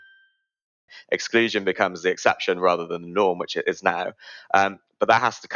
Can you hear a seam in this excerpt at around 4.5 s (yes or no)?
no